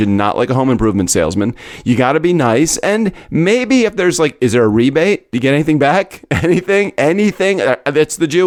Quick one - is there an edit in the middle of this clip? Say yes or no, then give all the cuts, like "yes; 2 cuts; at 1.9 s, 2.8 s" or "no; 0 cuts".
no; 0 cuts